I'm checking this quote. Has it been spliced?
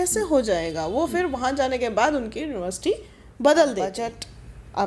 yes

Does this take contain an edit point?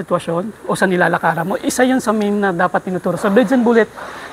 no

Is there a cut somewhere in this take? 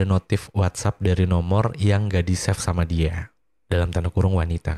no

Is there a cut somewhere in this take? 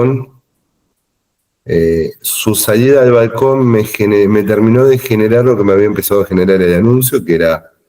no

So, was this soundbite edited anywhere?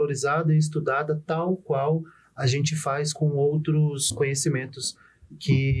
yes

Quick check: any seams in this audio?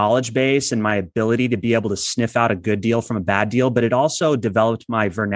no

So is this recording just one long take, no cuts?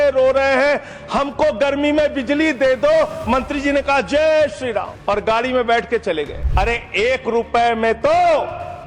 no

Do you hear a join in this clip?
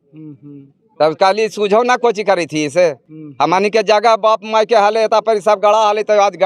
no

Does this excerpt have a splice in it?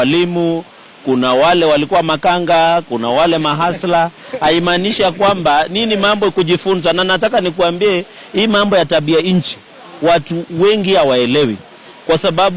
no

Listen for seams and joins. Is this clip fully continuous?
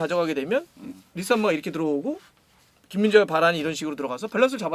yes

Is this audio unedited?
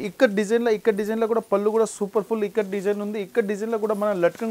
yes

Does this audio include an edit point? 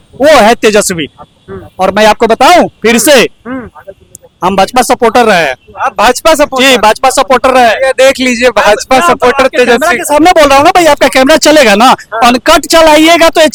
no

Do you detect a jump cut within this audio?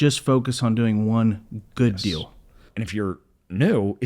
yes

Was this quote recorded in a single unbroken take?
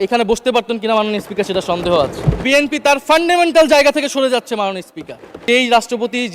no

